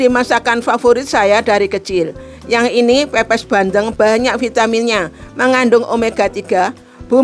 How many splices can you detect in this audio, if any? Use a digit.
0